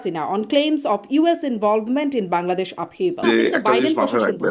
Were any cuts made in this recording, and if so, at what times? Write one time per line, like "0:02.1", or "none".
0:03.2